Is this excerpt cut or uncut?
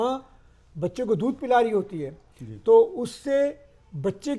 uncut